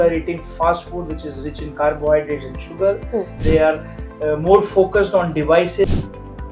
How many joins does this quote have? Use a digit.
2